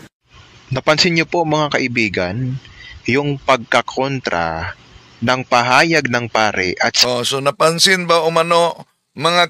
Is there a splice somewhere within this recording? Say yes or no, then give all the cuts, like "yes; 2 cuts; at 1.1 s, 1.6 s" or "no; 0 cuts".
no; 0 cuts